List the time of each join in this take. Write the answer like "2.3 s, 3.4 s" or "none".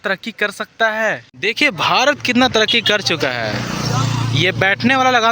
1.3 s

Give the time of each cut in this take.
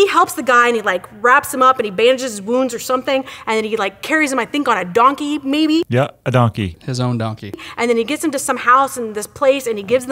none

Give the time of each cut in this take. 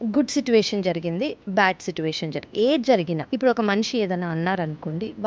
3.3 s

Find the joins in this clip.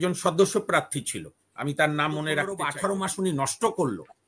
2.7 s

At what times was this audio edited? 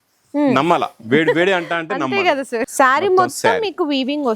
2.7 s

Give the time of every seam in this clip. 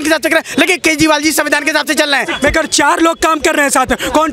2.3 s

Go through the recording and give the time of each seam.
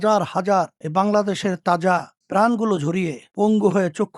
3.2 s

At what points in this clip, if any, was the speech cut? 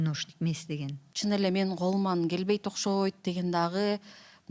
1.0 s

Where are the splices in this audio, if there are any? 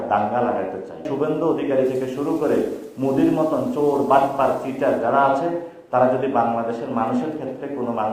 1.1 s

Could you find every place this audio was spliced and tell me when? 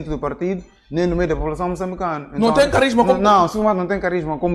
none

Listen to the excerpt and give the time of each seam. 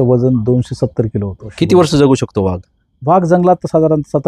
1.4 s

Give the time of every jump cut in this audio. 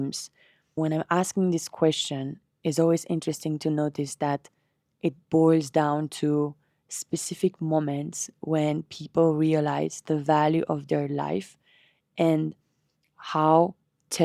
none

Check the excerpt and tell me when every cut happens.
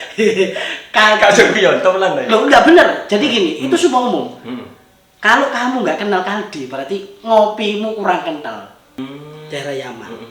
9.0 s

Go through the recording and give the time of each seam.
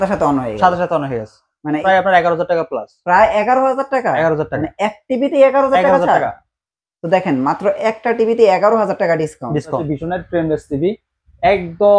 1.8 s, 9.8 s

